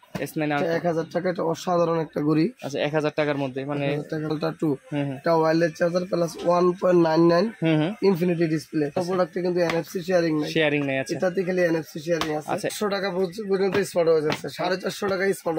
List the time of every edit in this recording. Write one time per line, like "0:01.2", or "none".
0:04.3
0:09.0
0:12.7